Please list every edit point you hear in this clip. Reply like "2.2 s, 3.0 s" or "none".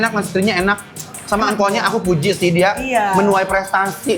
none